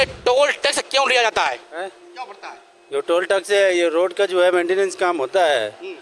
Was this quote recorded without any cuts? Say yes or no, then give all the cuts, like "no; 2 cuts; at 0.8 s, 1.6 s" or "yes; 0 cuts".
yes; 0 cuts